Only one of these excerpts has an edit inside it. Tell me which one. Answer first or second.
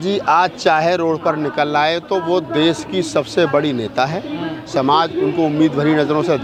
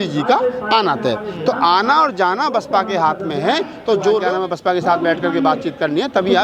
second